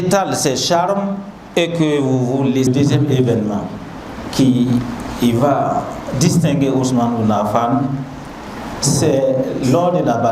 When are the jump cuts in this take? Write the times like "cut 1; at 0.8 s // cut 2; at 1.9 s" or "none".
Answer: cut 1; at 2.7 s